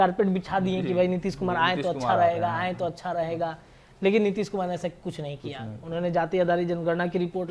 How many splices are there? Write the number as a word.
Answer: zero